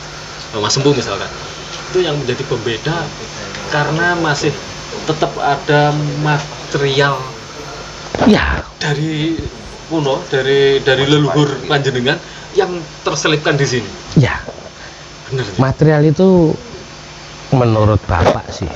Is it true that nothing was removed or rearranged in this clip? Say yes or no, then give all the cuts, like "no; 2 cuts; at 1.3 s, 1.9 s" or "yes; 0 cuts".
yes; 0 cuts